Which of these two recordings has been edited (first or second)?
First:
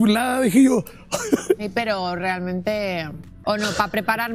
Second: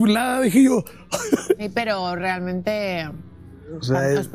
first